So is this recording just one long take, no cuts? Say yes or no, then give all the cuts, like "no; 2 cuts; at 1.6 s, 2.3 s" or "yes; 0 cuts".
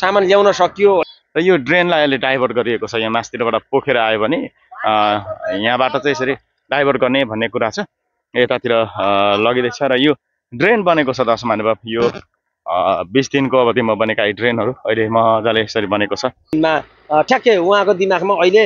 no; 2 cuts; at 1.0 s, 16.5 s